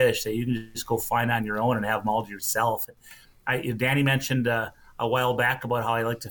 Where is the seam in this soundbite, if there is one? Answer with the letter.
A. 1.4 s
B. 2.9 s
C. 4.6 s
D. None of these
D